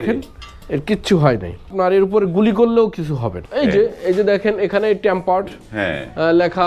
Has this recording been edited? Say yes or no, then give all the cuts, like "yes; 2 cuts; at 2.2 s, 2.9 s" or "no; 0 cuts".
yes; 2 cuts; at 1.7 s, 3.3 s